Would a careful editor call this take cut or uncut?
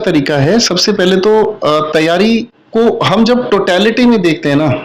uncut